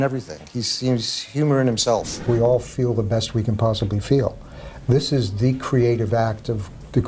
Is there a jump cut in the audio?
yes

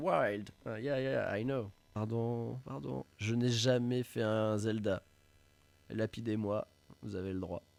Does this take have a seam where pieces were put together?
no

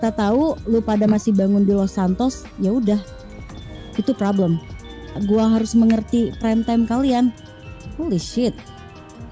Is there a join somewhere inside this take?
yes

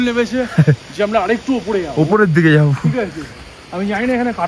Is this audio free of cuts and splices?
yes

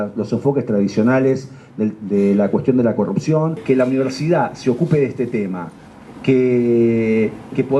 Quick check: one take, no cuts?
no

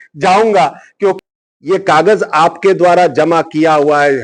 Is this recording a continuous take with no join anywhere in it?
no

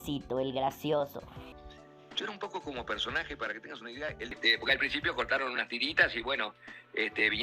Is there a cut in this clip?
yes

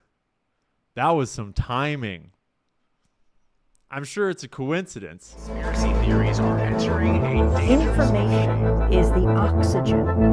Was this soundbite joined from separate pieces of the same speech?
yes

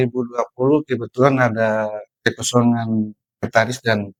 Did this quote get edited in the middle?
no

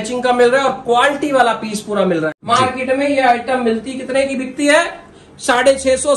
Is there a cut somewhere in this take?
yes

